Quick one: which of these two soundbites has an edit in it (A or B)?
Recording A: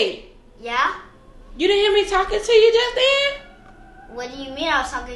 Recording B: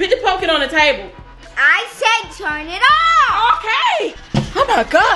B